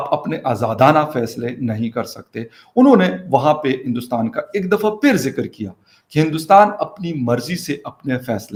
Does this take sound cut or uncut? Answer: uncut